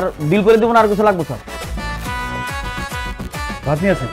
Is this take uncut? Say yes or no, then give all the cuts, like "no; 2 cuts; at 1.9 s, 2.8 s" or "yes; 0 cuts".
no; 1 cut; at 1.4 s